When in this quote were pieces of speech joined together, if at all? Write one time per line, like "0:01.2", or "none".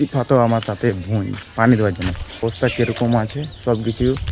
0:02.4